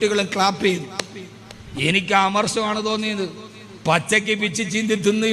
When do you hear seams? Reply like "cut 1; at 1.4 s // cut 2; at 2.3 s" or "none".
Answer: none